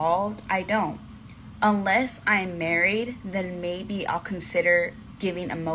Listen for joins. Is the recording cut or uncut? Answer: cut